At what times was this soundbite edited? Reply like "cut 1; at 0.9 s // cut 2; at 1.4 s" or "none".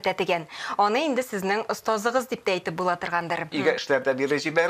cut 1; at 3.5 s